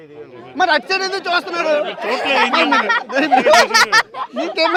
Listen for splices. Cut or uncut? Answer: uncut